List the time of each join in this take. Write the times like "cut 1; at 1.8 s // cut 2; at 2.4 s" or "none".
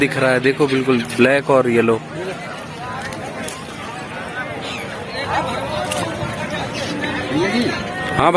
none

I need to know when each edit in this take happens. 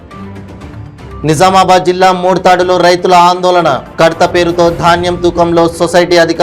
none

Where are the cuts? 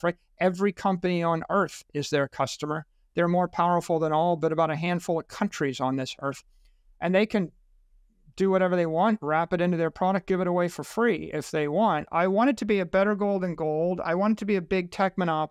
cut 1; at 12.1 s

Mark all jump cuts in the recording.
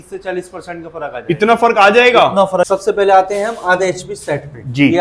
cut 1; at 2.7 s

